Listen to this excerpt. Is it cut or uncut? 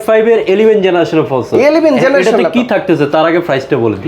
uncut